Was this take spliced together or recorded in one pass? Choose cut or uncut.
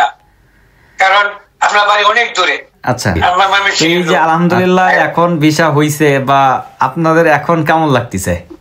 cut